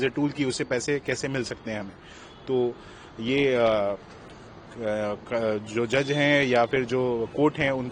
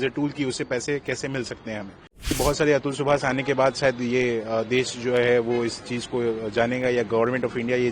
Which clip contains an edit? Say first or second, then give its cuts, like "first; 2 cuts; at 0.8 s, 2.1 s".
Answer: second; 1 cut; at 2.3 s